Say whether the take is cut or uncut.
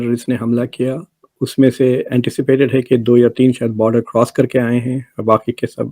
cut